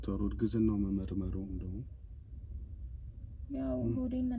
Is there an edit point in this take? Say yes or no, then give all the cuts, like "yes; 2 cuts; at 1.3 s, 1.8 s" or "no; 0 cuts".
no; 0 cuts